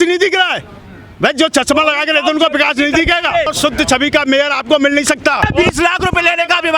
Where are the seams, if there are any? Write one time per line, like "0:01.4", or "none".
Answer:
0:03.5
0:05.5